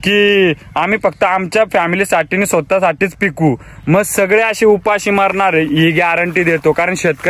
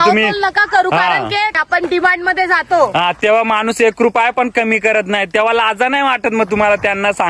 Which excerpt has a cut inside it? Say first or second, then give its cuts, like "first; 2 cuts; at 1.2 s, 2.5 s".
second; 1 cut; at 1.6 s